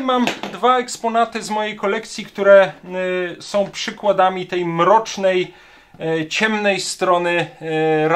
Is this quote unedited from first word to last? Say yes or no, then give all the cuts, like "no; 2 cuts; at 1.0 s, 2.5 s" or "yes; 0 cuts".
yes; 0 cuts